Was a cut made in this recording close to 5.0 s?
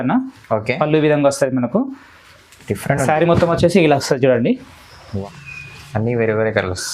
yes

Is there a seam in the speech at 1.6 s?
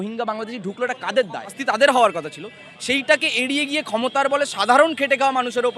yes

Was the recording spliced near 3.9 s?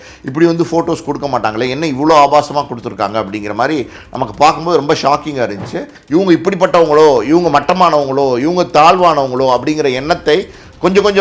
no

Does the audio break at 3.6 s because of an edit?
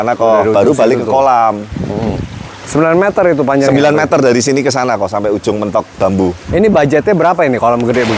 no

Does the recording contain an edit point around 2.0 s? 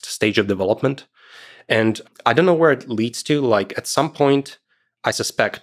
yes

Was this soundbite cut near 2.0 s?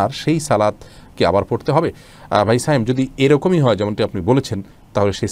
no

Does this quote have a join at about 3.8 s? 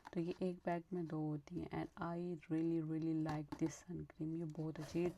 no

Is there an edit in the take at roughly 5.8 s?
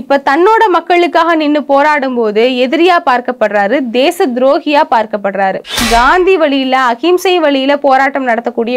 yes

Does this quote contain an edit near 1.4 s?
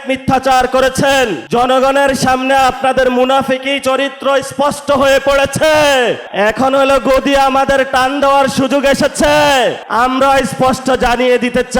yes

